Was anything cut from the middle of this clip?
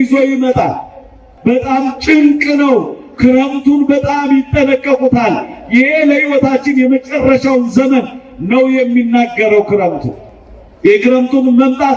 yes; 1 cut; at 1.3 s

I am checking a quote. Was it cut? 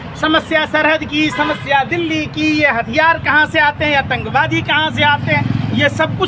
no; 0 cuts

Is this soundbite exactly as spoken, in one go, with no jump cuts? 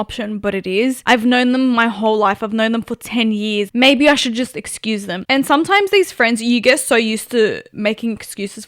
no; 3 cuts; at 1.0 s, 3.7 s, 5.1 s

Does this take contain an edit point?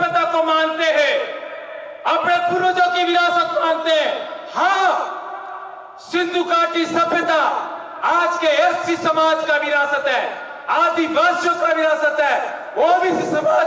no; 0 cuts

